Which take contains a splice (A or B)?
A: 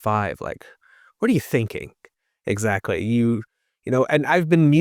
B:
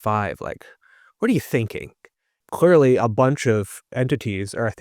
B